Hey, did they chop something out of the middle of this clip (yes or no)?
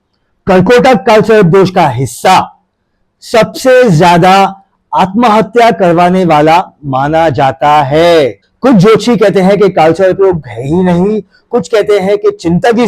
yes